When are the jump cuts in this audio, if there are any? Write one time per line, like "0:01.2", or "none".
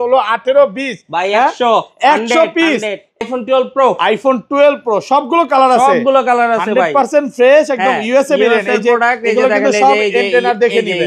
0:03.2